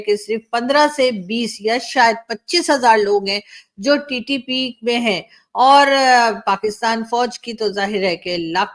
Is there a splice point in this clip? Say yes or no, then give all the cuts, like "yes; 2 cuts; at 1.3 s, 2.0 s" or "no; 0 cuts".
no; 0 cuts